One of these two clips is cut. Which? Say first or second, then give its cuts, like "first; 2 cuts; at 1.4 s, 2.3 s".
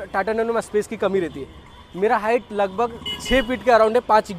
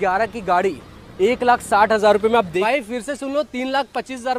second; 1 cut; at 2.5 s